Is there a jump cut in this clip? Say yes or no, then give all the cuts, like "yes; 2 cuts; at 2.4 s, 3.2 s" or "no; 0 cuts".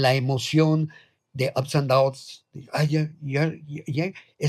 no; 0 cuts